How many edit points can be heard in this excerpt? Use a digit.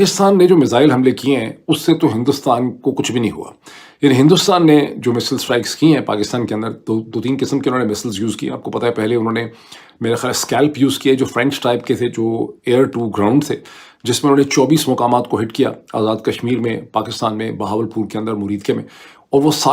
0